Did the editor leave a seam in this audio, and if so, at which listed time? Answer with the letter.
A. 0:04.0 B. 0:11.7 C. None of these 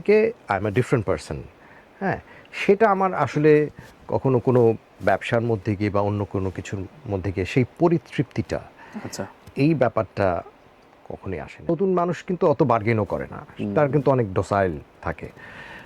B